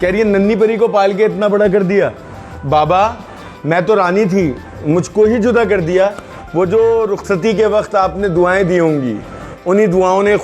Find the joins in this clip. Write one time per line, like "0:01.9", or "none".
none